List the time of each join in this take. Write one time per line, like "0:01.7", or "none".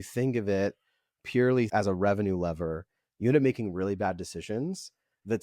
0:01.7

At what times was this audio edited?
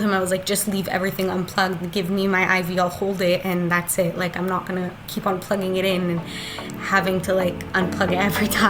none

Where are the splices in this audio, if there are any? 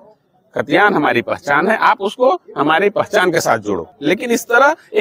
0:03.9

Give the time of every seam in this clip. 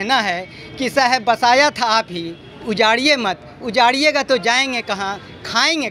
none

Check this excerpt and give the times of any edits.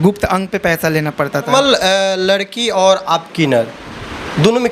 0:01.5

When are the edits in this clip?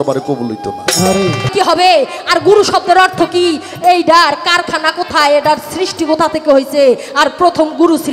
0:01.5

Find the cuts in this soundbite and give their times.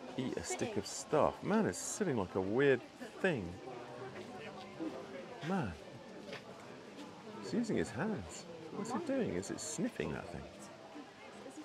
none

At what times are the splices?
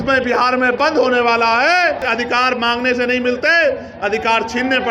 0:02.1

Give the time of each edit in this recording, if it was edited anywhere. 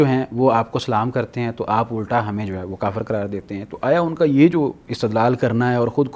none

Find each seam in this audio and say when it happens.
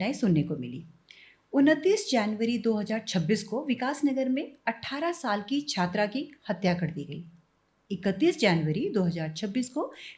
none

